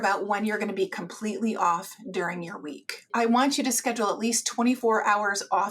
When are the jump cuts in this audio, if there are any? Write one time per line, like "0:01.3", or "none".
0:03.1
0:04.8

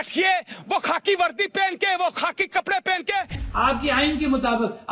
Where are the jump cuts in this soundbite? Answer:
0:03.4

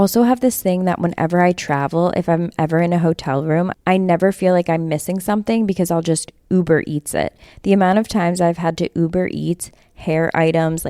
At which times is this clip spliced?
none

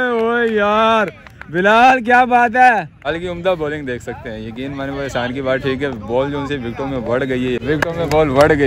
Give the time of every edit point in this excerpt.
0:03.1
0:07.6

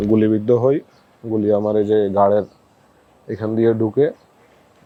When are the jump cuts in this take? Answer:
none

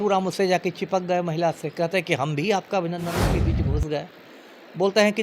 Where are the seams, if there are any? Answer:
0:03.3

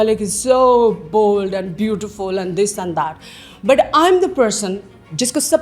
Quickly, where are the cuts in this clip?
none

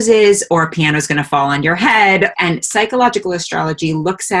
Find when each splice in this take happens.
0:02.3

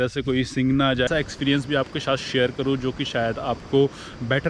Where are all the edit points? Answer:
0:01.1

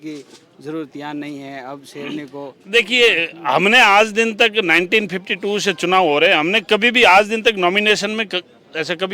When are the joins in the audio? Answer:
none

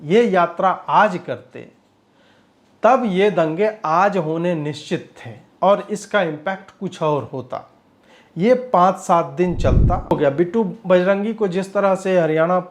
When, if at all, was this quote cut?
0:10.1

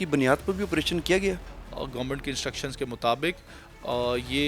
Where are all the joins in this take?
0:01.4

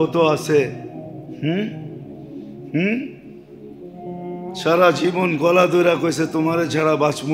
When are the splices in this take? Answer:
0:03.1
0:04.6

